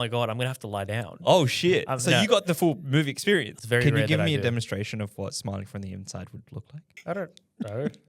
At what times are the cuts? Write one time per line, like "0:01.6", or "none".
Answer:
0:03.5
0:06.8